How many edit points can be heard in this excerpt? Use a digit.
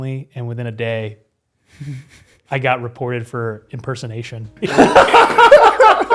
1